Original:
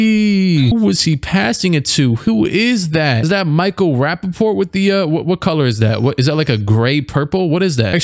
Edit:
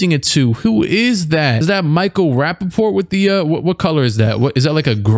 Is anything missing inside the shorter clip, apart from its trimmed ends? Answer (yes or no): no